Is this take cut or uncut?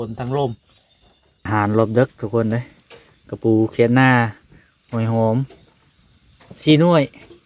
cut